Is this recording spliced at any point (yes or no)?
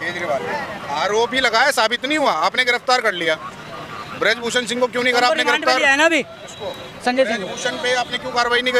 no